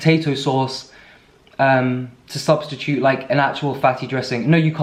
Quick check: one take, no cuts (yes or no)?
yes